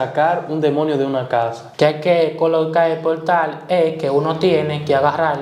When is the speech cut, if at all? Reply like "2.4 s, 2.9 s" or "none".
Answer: 1.6 s